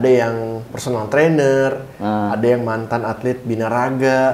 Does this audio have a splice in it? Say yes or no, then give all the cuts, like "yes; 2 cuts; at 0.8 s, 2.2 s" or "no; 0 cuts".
no; 0 cuts